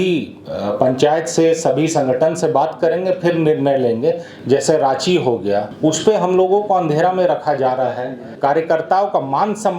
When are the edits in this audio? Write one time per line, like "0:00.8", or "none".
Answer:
0:04.3
0:05.7
0:08.2